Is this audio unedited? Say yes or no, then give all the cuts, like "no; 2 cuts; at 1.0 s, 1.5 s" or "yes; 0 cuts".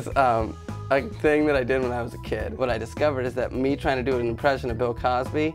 no; 1 cut; at 2.5 s